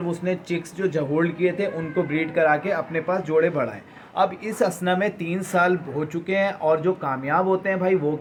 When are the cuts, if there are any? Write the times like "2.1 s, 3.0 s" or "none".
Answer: none